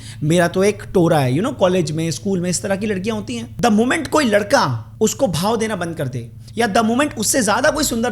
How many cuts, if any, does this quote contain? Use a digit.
2